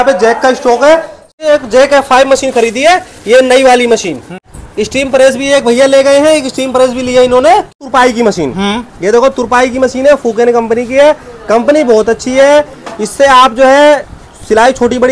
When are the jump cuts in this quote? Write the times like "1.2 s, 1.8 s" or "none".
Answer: 1.4 s, 4.5 s, 7.8 s